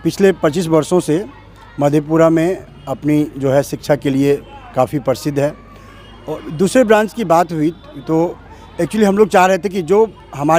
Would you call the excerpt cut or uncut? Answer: uncut